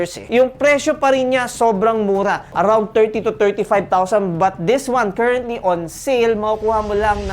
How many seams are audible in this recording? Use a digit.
1